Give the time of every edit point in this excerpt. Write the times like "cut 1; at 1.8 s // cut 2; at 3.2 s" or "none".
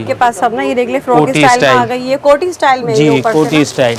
none